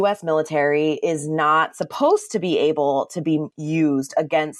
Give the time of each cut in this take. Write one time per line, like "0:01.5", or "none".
none